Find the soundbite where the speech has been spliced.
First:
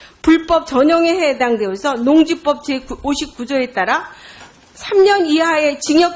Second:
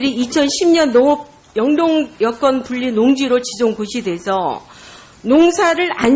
first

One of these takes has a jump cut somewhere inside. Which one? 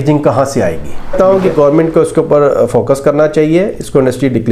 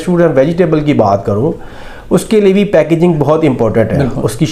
first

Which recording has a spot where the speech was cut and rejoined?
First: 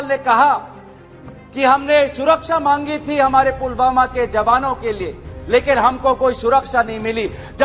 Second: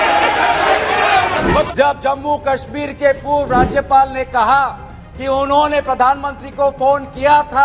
second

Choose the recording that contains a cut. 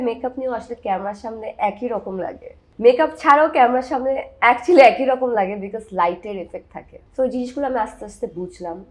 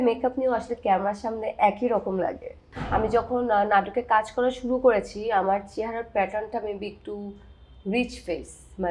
second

